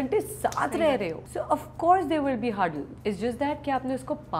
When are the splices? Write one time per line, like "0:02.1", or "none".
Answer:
0:01.2
0:02.9